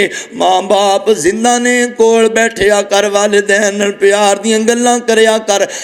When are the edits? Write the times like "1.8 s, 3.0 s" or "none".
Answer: none